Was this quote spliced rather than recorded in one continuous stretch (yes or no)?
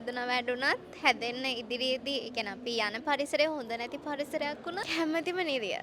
yes